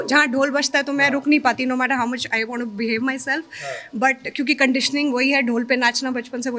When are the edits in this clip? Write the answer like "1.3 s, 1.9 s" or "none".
none